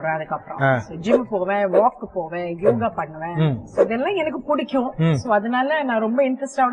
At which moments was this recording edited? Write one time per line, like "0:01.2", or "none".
none